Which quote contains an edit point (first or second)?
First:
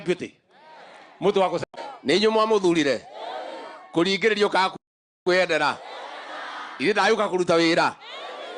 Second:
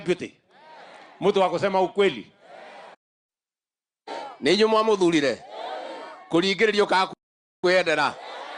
first